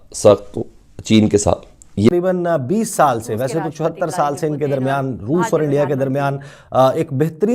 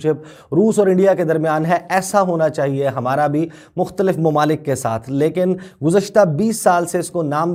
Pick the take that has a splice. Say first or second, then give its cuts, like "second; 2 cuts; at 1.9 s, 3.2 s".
first; 1 cut; at 2.1 s